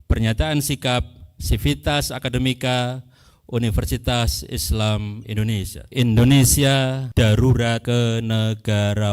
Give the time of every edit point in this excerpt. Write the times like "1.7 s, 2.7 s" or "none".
5.8 s, 7.0 s, 7.8 s